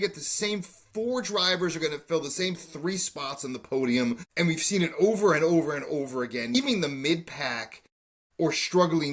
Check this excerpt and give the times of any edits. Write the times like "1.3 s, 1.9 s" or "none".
4.3 s, 6.5 s